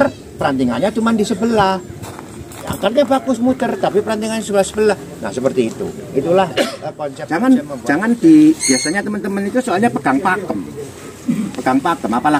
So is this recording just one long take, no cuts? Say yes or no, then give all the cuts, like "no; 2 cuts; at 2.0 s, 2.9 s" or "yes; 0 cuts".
no; 1 cut; at 7.1 s